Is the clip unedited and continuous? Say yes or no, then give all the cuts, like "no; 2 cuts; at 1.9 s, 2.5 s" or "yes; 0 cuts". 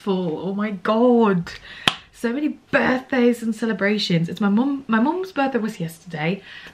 yes; 0 cuts